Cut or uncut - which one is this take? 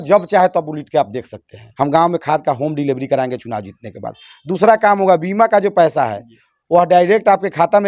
cut